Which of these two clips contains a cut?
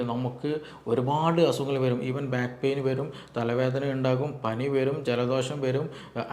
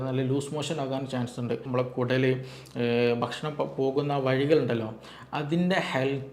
second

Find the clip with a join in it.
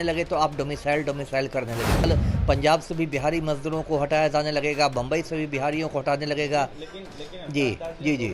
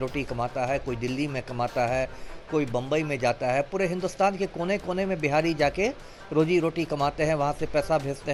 first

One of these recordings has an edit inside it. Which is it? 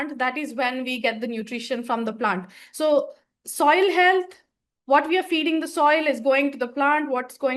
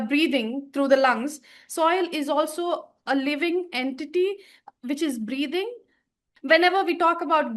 second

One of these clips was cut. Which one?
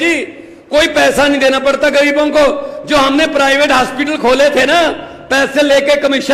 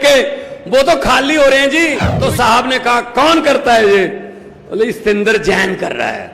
second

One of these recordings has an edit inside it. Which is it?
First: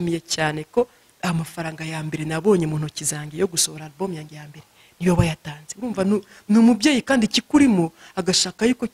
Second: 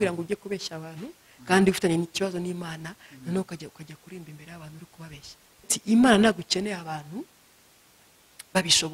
second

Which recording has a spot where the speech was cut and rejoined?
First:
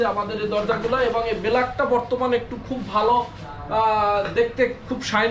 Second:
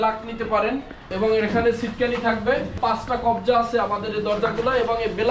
second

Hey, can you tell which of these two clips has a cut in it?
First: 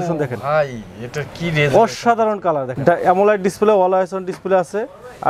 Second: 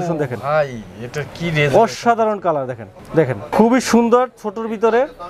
first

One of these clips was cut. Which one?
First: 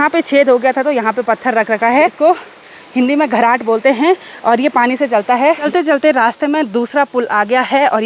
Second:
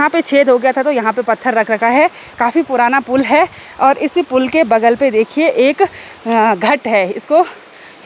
first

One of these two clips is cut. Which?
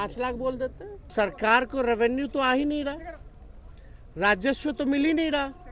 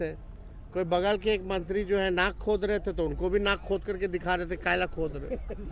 first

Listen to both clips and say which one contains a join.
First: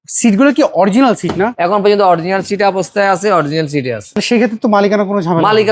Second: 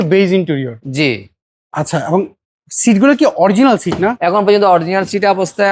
first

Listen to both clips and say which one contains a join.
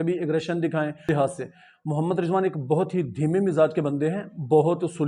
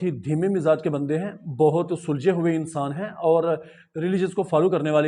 first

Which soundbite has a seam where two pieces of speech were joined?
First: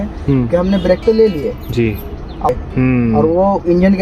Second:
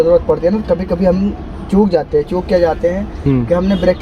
first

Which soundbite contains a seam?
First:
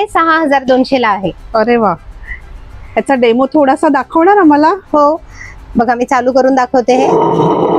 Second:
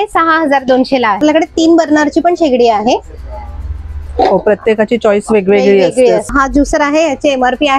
second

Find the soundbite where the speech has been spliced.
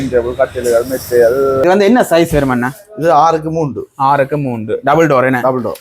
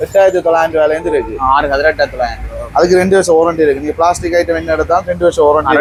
first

